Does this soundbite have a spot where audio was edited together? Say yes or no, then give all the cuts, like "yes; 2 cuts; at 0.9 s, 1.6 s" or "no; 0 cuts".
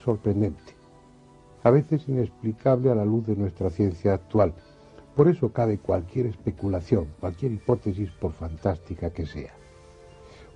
no; 0 cuts